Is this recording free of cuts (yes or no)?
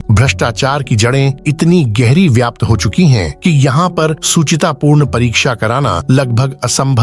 yes